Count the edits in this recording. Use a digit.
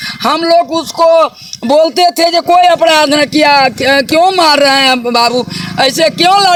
0